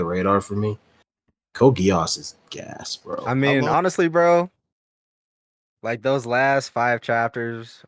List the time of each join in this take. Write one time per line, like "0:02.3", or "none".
0:03.3